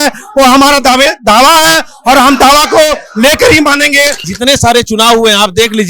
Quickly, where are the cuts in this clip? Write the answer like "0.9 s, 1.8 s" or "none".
4.3 s